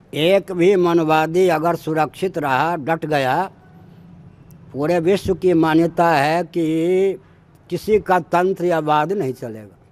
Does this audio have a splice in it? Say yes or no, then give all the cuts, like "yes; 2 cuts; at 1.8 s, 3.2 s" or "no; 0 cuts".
no; 0 cuts